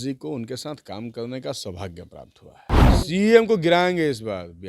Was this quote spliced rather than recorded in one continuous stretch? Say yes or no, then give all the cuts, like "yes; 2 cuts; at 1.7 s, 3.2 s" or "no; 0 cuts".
yes; 1 cut; at 2.8 s